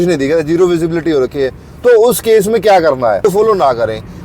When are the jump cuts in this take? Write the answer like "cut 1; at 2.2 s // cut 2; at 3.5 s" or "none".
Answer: cut 1; at 3.2 s